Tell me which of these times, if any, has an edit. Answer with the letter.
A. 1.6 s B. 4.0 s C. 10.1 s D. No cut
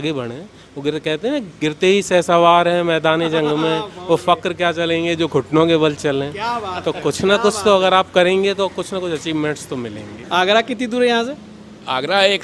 C